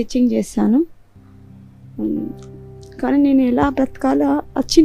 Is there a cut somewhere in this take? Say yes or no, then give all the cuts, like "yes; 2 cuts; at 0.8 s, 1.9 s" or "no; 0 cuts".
no; 0 cuts